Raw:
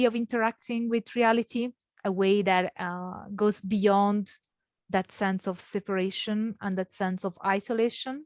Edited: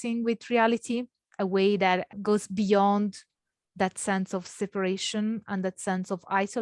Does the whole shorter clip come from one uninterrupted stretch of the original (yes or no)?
no